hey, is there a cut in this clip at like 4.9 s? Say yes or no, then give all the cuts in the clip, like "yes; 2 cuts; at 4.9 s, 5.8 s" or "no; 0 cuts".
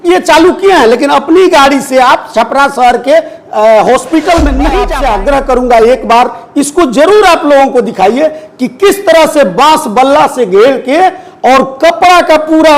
yes; 1 cut; at 4.9 s